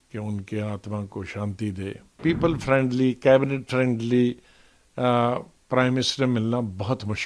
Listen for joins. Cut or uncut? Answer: cut